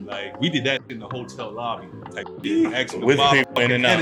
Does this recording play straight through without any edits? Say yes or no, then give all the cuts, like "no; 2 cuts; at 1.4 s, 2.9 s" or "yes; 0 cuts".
yes; 0 cuts